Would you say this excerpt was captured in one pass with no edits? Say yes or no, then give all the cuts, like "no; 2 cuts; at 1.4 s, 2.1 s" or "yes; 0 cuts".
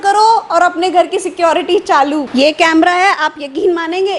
no; 1 cut; at 2.3 s